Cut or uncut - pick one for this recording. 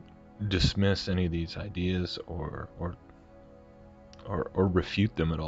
uncut